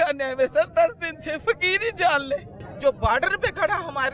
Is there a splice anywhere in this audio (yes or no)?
yes